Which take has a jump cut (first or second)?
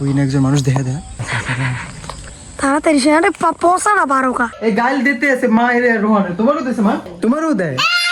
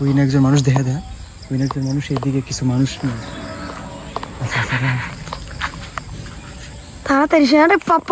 first